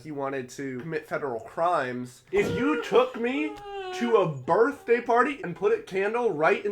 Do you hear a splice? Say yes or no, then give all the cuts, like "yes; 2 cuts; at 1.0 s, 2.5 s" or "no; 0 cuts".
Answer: yes; 3 cuts; at 0.8 s, 2.2 s, 5.3 s